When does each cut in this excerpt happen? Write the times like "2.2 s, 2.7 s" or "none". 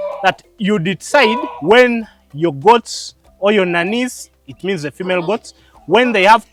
none